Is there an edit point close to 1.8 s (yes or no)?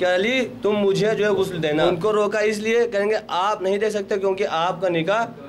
yes